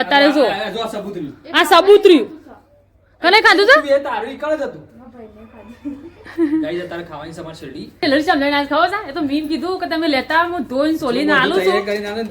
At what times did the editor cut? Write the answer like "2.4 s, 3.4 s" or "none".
8.0 s